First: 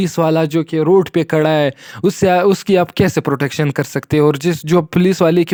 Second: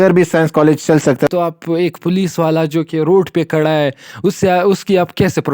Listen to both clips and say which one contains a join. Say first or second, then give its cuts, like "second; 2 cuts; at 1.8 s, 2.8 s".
second; 1 cut; at 1.2 s